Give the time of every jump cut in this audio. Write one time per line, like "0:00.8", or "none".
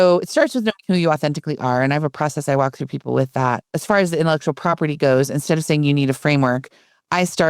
0:03.7